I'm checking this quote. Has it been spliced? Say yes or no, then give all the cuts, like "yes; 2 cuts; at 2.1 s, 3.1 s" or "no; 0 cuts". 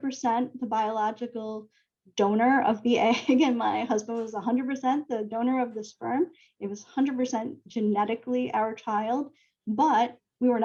no; 0 cuts